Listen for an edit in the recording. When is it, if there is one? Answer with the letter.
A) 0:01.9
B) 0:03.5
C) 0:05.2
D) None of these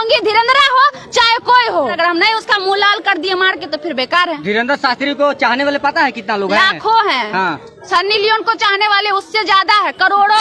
A